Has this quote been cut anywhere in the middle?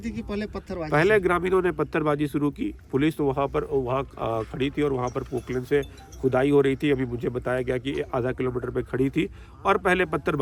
no; 0 cuts

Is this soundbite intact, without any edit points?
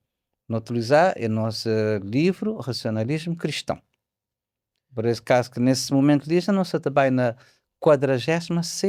yes; 0 cuts

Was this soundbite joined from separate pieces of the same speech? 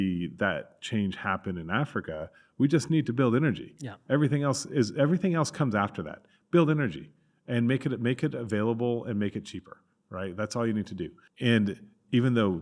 yes; 1 cut; at 11.2 s

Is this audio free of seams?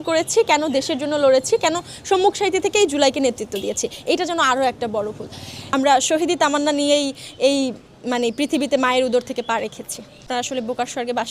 no; 2 cuts; at 5.6 s, 10.2 s

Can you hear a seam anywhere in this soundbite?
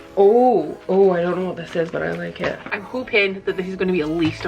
yes; 1 cut; at 2.7 s

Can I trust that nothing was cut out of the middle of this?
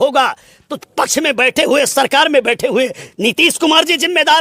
yes; 0 cuts

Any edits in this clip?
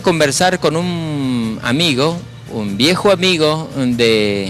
yes; 1 cut; at 1.5 s

